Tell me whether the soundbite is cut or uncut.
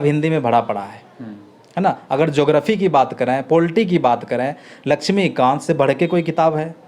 uncut